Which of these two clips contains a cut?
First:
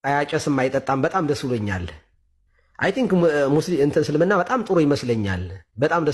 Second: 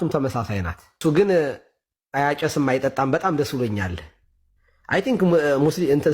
second; 1 cut; at 1.0 s

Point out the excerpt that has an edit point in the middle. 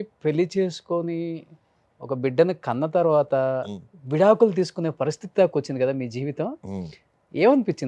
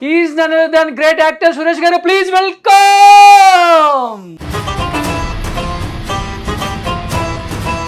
second; 1 cut; at 4.3 s

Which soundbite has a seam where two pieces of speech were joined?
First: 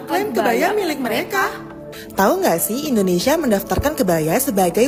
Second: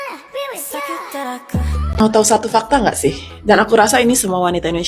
second; 1 cut; at 2.0 s

